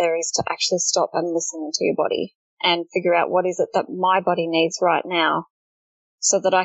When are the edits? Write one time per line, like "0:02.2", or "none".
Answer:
none